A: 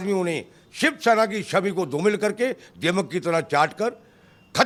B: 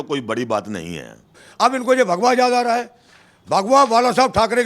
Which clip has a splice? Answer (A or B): B